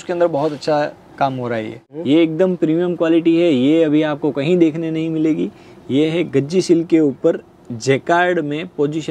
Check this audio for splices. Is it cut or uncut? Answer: cut